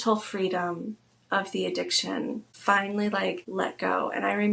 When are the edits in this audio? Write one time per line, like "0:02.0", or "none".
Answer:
0:02.5
0:03.4

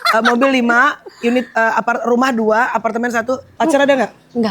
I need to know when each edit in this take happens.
0:03.5

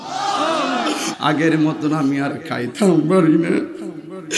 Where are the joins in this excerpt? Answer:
0:01.1

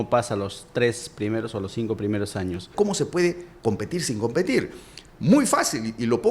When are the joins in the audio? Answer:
0:02.7

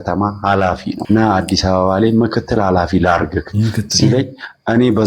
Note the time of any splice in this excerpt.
0:00.9

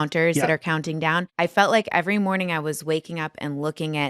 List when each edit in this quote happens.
0:01.3

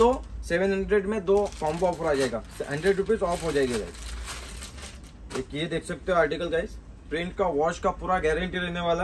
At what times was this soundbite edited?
none

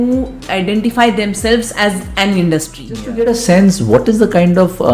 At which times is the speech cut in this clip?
0:03.0

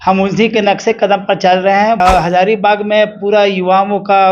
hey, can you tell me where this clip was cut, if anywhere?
0:02.0

